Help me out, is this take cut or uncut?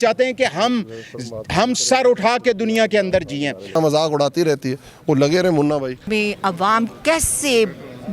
cut